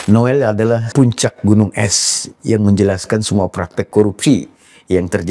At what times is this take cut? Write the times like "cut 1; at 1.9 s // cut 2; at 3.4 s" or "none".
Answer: cut 1; at 0.9 s // cut 2; at 3.9 s